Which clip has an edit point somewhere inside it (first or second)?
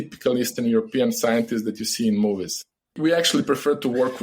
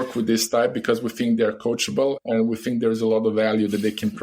first